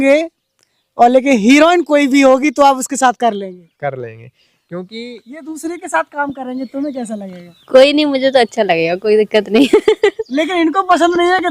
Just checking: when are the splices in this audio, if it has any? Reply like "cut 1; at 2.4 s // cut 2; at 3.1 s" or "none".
none